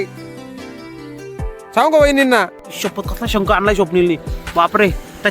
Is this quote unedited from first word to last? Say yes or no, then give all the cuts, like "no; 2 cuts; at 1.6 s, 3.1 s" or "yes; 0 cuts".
no; 1 cut; at 2.6 s